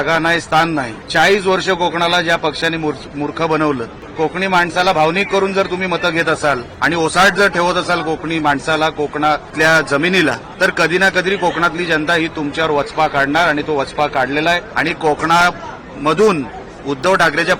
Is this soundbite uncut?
no; 6 cuts; at 1.0 s, 4.0 s, 6.7 s, 9.5 s, 10.5 s, 14.7 s

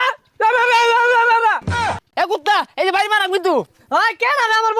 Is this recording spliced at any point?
yes; 1 cut; at 2.1 s

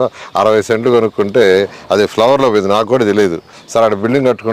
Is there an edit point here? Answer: yes; 1 cut; at 3.6 s

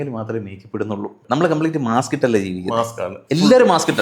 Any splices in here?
yes; 1 cut; at 1.2 s

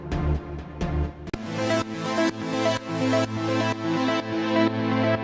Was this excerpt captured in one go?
no; 1 cut; at 1.4 s

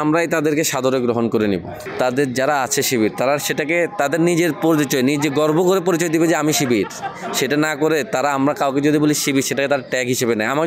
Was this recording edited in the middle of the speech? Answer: yes; 1 cut; at 1.9 s

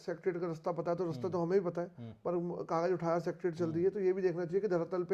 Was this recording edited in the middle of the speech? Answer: no; 0 cuts

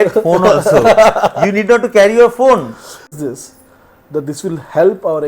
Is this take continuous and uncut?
no; 1 cut; at 3.2 s

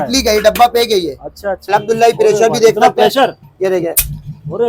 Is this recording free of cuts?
no; 1 cut; at 1.6 s

